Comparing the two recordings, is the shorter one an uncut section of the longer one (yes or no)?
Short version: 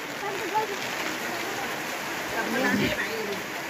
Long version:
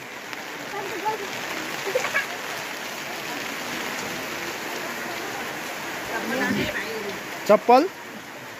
no